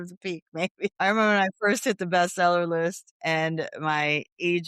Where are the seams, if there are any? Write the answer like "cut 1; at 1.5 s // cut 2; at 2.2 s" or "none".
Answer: cut 1; at 1.0 s